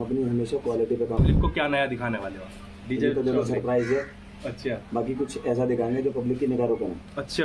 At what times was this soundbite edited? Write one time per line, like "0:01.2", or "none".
0:01.2